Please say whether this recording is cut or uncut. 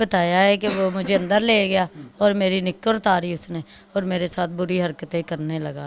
uncut